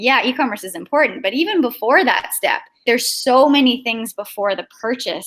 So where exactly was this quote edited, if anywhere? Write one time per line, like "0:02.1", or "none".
0:02.8